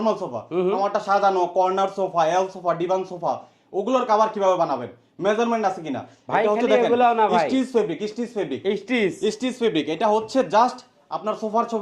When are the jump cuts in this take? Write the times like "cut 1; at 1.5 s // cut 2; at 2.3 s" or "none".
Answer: none